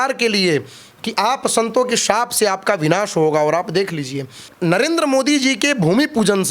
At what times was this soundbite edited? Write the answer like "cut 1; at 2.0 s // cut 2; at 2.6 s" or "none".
cut 1; at 4.5 s